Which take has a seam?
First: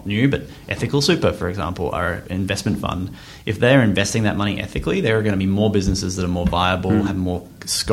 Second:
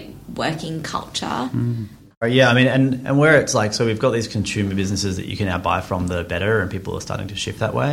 second; 1 cut; at 2.2 s

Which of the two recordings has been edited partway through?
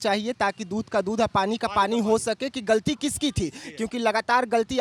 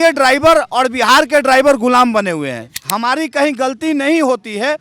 second; 1 cut; at 2.7 s

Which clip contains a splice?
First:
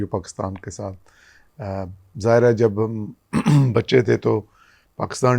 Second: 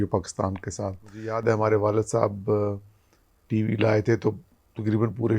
second; 1 cut; at 1.4 s

